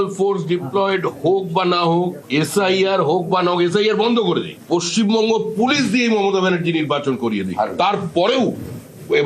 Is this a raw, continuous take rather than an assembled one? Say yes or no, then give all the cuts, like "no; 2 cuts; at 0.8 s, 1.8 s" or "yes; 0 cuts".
no; 1 cut; at 4.5 s